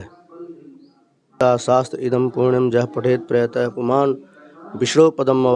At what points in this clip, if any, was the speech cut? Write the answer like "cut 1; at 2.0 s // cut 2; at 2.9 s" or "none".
cut 1; at 1.4 s